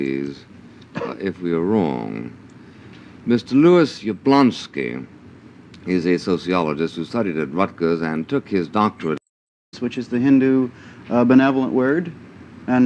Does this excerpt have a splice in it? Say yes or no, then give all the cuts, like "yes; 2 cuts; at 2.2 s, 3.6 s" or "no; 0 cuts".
yes; 1 cut; at 9.7 s